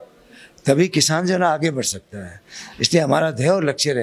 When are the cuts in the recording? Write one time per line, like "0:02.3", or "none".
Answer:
none